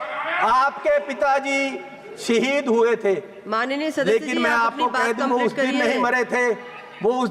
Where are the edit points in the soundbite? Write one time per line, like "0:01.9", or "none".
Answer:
none